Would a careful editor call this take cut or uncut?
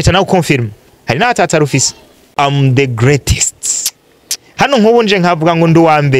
cut